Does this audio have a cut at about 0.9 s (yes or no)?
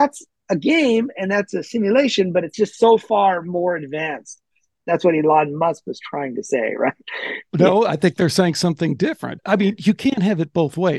no